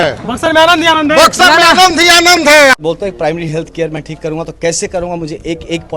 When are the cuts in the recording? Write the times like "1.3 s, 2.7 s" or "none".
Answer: 2.7 s